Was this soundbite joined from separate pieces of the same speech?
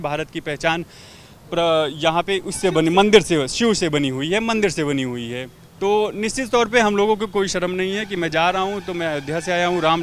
no; 0 cuts

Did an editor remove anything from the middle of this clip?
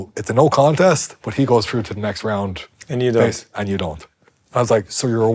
no; 0 cuts

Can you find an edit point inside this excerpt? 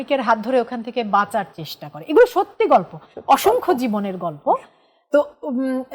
no; 0 cuts

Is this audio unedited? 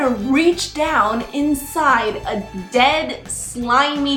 yes; 0 cuts

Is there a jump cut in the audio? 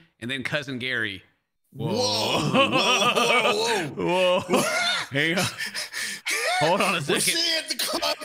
no; 0 cuts

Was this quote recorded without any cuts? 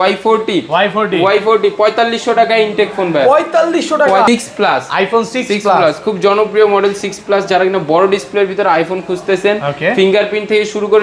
no; 1 cut; at 4.3 s

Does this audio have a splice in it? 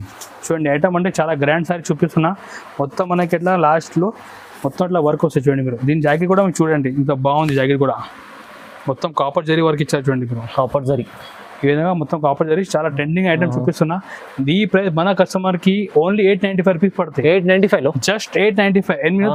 no; 0 cuts

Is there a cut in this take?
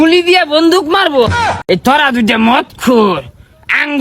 yes; 1 cut; at 1.4 s

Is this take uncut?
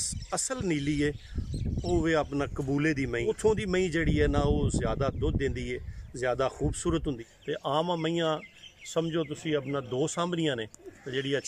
no; 2 cuts; at 3.2 s, 7.2 s

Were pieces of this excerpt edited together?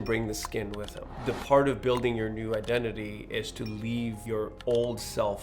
yes; 2 cuts; at 1.0 s, 4.3 s

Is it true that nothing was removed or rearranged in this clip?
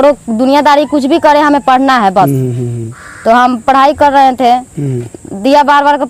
yes; 0 cuts

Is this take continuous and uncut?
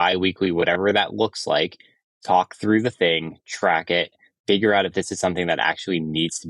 yes; 0 cuts

